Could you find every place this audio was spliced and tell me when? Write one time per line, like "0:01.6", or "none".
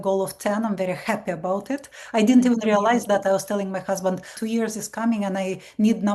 0:04.4

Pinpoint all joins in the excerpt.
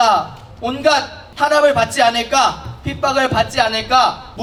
none

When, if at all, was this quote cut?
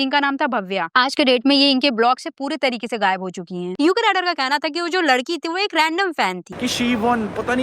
0:03.7
0:06.5

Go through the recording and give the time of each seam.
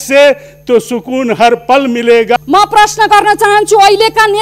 0:02.4

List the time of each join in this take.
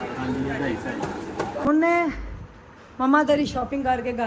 0:01.6

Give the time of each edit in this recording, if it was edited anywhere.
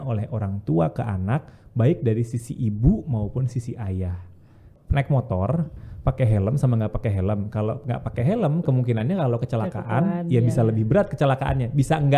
0:04.7

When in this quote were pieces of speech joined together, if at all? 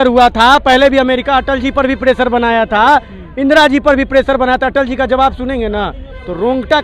none

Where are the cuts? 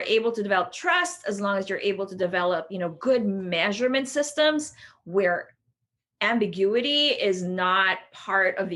none

